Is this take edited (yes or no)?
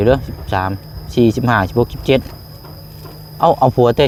no